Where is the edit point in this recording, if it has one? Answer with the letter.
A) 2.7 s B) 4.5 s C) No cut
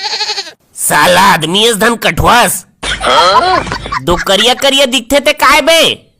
A